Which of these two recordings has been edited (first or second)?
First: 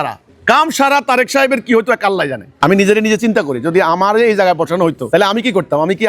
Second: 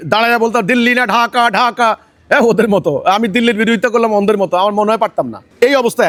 first